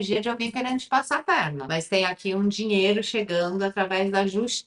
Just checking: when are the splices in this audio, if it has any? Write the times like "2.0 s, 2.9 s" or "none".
1.6 s